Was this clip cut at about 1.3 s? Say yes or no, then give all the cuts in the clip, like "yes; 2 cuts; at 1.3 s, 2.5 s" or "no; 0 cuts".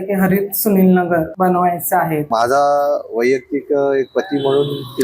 yes; 2 cuts; at 1.3 s, 2.2 s